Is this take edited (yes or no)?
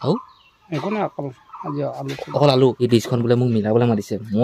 yes